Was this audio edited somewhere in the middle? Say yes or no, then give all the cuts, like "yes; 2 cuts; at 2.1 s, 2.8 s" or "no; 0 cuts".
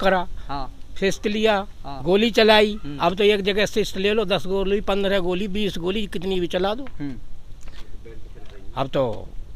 no; 0 cuts